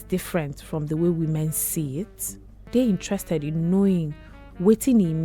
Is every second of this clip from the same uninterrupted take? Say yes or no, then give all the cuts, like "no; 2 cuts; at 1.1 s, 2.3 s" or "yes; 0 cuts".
no; 1 cut; at 2.7 s